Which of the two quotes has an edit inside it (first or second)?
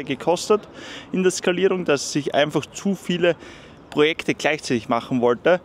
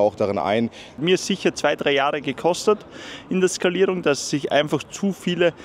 second